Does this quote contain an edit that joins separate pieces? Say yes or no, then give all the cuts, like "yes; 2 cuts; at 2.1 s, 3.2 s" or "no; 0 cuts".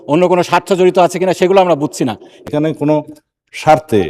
yes; 1 cut; at 2.3 s